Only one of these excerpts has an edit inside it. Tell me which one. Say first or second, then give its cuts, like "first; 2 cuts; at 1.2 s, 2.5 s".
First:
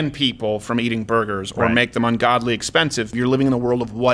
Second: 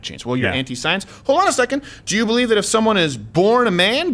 first; 1 cut; at 3.1 s